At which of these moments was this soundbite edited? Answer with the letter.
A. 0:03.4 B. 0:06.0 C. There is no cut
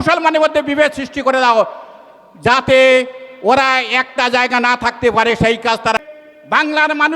B